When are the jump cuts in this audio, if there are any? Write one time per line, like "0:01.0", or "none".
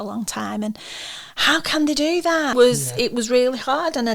0:02.5